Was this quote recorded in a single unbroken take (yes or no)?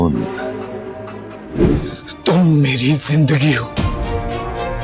no